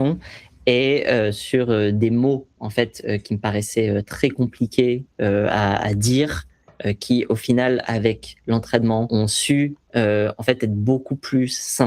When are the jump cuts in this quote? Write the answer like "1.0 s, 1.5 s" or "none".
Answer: 9.1 s